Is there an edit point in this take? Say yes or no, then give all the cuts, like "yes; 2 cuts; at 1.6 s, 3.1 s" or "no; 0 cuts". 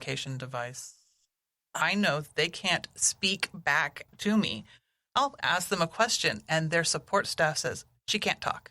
yes; 1 cut; at 4.1 s